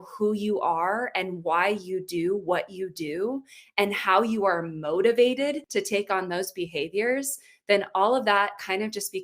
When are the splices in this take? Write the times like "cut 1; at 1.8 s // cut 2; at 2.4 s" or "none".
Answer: cut 1; at 5.6 s